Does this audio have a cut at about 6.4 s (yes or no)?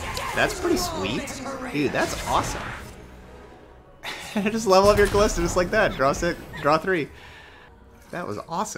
no